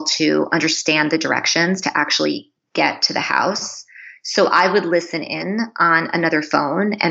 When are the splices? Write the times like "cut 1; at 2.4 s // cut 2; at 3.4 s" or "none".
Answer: none